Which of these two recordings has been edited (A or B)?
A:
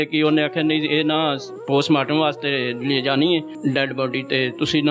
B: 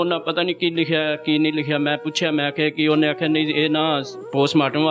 A